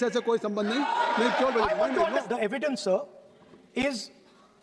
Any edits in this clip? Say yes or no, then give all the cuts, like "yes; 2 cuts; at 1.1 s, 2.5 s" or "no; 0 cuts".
yes; 1 cut; at 2.2 s